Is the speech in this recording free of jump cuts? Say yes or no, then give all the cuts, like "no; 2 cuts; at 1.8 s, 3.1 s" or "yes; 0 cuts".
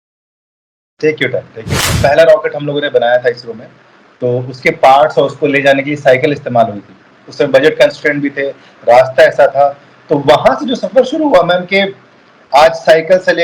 no; 1 cut; at 1.9 s